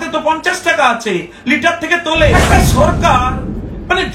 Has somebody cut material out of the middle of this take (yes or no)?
yes